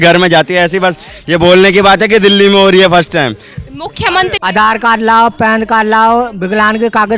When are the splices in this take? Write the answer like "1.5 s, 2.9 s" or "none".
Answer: 4.4 s